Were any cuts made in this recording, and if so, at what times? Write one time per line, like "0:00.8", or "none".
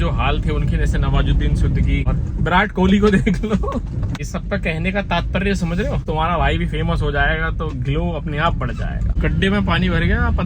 0:02.1
0:04.2
0:06.0
0:09.2